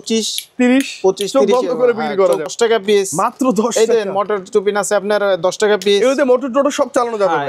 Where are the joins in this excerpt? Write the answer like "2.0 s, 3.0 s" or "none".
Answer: 2.5 s